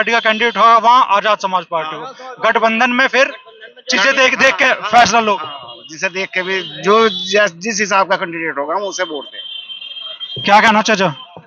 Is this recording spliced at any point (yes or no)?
no